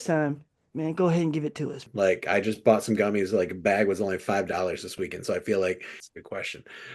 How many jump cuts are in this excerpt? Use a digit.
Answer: 2